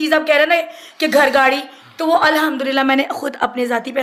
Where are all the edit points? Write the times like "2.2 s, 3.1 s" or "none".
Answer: none